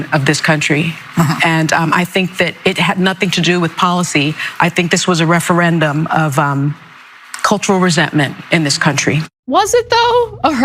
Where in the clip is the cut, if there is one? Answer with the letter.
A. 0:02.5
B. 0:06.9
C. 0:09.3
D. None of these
C